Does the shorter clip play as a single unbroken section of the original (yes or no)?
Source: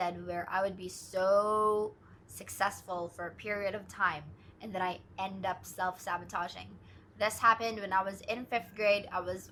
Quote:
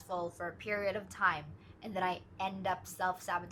yes